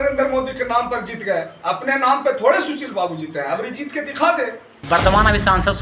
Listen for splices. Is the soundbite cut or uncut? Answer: cut